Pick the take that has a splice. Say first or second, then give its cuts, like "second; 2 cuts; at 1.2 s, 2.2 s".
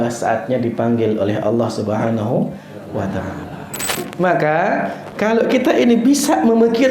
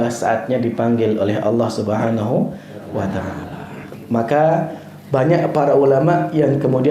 first; 1 cut; at 4.0 s